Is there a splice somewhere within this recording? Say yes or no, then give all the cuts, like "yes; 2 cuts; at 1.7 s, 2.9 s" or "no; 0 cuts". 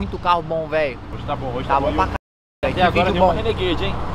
yes; 1 cut; at 1.1 s